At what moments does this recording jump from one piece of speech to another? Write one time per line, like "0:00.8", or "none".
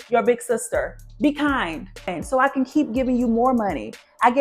0:02.2

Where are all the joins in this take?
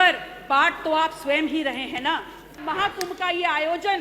0:02.6

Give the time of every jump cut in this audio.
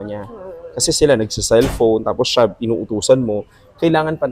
none

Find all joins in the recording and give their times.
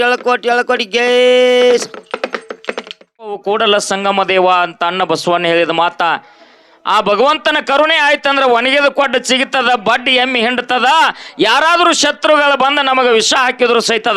0:03.4

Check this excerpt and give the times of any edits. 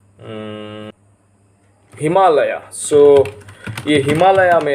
0:00.9

